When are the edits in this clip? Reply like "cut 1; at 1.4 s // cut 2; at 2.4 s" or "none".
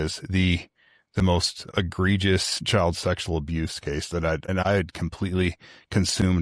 cut 1; at 1.6 s // cut 2; at 2.6 s // cut 3; at 4.6 s